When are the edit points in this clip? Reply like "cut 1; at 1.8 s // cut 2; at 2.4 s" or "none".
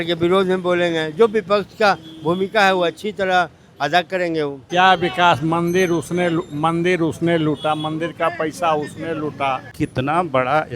cut 1; at 4.6 s // cut 2; at 9.7 s